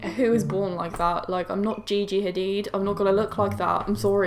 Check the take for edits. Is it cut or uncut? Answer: uncut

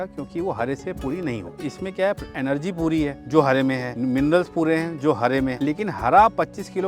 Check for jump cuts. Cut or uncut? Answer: cut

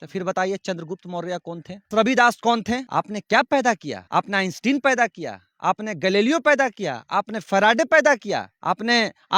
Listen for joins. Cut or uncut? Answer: cut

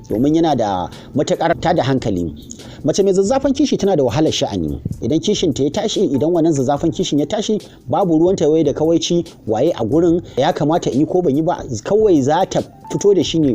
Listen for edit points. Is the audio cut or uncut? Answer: cut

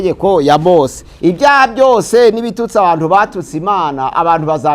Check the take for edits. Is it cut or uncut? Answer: cut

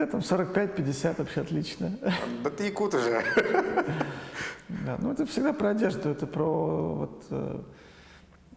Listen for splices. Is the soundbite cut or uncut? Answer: uncut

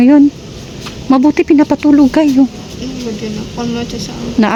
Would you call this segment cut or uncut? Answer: uncut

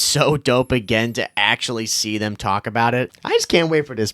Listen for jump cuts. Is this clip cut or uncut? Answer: cut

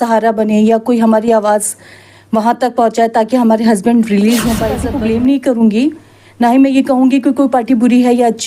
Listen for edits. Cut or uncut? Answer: cut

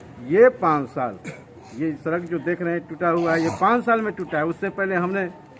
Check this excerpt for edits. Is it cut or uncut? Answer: uncut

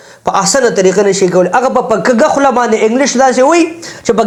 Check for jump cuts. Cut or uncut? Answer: uncut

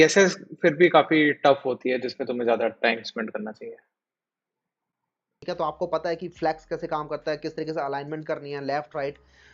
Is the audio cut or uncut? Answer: uncut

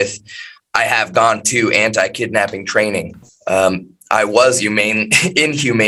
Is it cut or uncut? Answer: uncut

